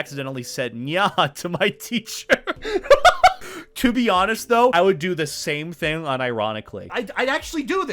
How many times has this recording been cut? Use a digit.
0